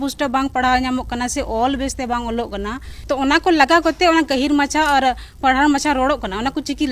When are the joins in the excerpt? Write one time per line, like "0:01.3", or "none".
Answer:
0:02.9